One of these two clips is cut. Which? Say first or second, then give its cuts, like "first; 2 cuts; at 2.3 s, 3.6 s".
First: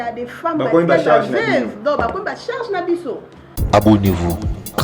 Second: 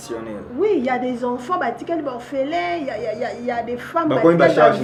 first; 1 cut; at 3.5 s